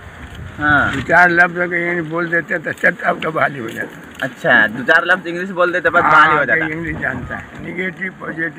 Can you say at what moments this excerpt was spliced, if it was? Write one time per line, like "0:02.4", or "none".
none

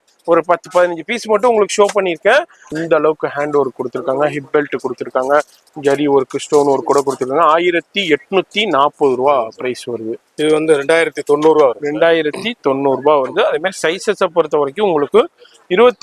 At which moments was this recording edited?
0:02.6
0:10.2

